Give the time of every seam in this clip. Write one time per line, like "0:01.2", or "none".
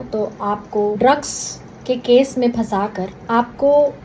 0:01.0
0:03.1